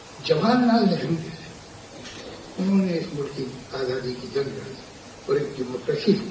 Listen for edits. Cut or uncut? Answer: uncut